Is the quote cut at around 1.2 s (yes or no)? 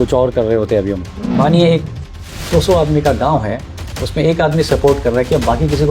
yes